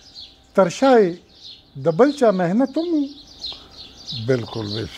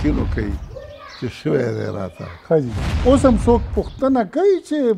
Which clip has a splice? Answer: second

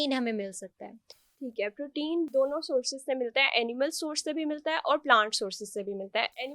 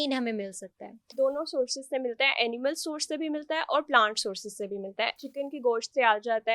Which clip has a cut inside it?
second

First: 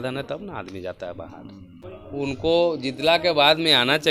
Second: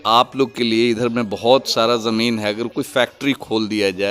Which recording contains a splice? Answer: first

